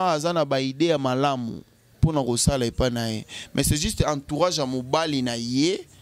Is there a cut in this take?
no; 0 cuts

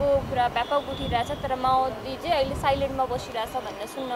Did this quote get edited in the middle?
no; 0 cuts

